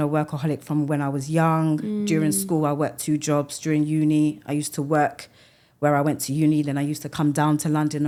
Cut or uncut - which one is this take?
uncut